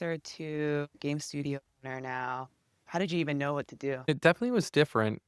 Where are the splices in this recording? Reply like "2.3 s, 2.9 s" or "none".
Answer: 1.0 s, 4.1 s